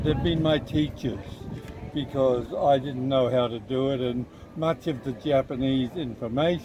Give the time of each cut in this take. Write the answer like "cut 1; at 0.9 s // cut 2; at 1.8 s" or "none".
none